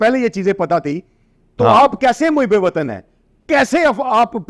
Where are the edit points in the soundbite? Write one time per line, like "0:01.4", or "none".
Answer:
none